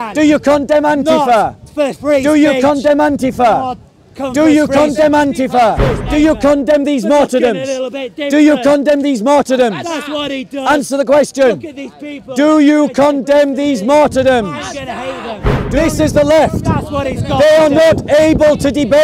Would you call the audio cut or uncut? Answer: cut